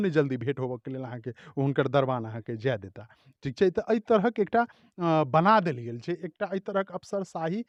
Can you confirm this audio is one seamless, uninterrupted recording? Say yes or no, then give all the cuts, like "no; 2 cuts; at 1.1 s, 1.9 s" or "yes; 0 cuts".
yes; 0 cuts